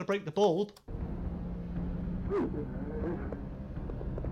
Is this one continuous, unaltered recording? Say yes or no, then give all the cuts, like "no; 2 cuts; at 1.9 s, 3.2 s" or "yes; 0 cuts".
no; 1 cut; at 0.9 s